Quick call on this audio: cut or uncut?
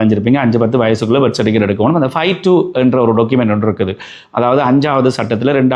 uncut